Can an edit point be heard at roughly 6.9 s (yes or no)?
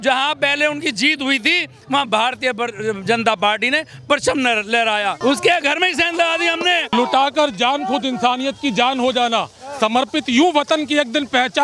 yes